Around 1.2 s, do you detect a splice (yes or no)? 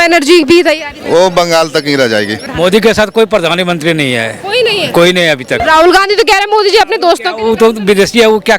no